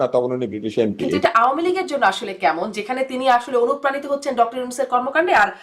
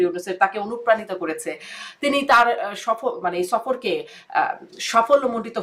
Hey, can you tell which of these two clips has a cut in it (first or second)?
first